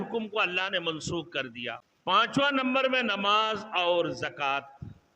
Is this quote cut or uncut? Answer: cut